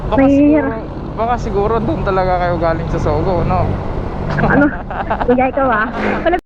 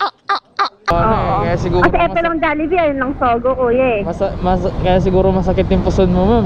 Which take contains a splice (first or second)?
second